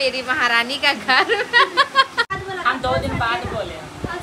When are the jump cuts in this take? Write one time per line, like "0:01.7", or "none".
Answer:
0:02.3